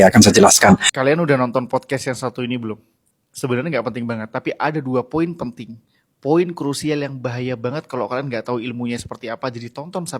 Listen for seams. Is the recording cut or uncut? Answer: cut